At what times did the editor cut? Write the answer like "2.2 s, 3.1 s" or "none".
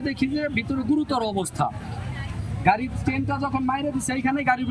none